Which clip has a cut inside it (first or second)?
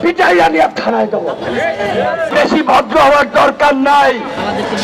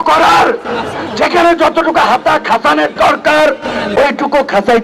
first